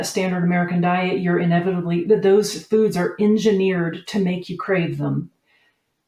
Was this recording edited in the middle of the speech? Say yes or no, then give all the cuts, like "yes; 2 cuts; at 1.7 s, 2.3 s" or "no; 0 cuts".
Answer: no; 0 cuts